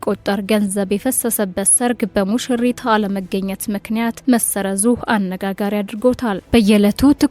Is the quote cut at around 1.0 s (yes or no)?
no